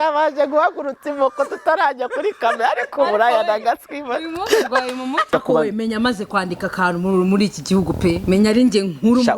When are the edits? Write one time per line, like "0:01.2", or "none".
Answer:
0:05.3